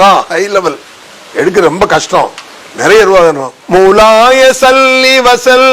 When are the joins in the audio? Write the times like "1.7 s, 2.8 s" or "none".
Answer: 3.5 s